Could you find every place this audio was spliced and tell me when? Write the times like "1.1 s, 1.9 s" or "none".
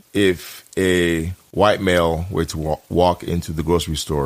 1.4 s